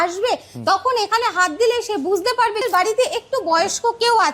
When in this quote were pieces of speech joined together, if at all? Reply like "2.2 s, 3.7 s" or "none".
2.6 s